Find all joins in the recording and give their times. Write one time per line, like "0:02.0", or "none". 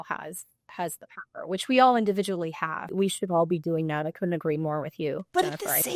0:02.9